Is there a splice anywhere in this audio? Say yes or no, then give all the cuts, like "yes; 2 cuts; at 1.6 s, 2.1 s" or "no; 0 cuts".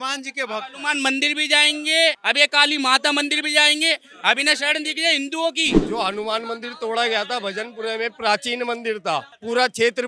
no; 0 cuts